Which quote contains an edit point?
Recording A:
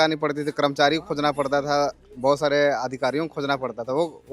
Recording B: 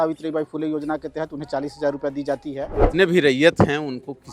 B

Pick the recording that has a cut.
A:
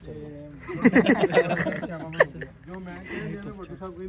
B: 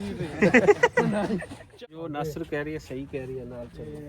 B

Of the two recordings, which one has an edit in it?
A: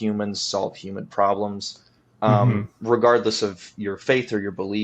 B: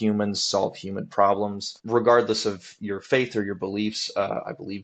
B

